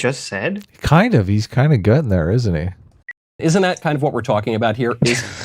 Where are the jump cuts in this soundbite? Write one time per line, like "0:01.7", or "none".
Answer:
0:03.4